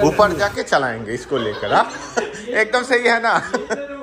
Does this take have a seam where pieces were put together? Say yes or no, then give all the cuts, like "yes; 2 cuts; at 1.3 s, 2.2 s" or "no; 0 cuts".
no; 0 cuts